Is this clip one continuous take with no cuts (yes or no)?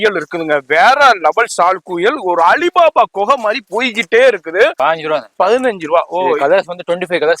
no